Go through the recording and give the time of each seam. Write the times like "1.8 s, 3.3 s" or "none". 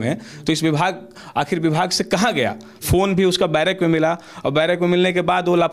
none

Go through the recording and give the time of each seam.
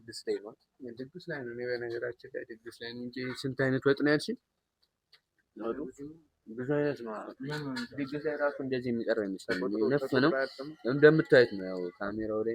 none

